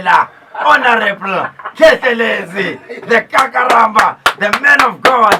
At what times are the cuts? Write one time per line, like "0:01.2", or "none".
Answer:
none